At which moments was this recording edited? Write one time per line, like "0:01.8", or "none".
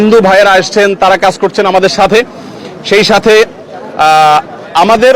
none